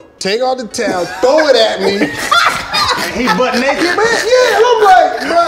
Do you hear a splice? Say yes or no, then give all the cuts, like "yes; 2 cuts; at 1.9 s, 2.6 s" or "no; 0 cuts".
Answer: no; 0 cuts